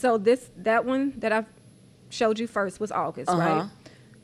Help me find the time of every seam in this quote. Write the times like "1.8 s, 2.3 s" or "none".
none

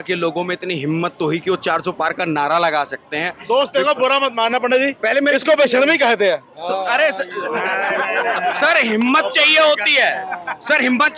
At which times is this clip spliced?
none

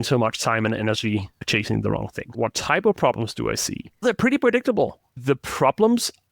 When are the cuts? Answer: 2.3 s, 4.0 s, 5.1 s

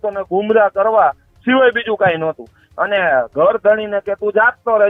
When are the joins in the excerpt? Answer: none

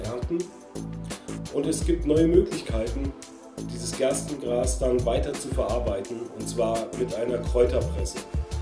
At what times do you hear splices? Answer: none

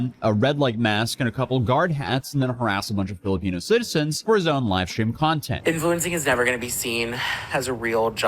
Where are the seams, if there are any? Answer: 5.5 s

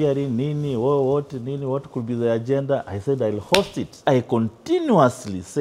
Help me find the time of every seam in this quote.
4.1 s

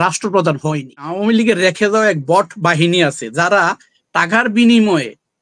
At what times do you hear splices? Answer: 1.1 s

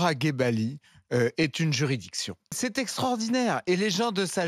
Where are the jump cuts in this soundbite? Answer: 2.5 s

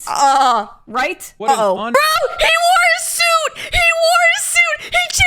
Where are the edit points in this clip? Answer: 1.9 s

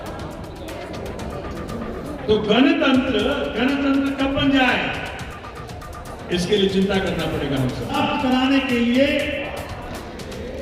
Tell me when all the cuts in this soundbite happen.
8.0 s

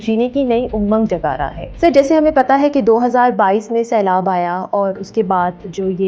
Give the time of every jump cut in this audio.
1.6 s

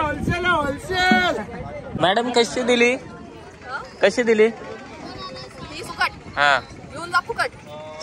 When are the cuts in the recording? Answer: 2.0 s

